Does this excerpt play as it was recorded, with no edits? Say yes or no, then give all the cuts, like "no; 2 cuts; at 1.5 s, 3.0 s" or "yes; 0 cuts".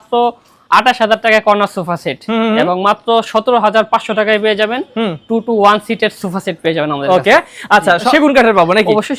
yes; 0 cuts